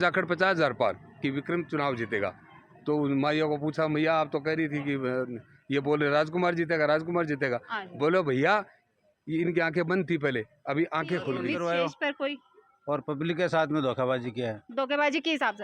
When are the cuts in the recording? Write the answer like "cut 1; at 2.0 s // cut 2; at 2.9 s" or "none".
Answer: cut 1; at 11.4 s